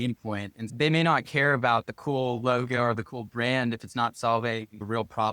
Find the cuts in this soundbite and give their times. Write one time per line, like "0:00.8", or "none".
none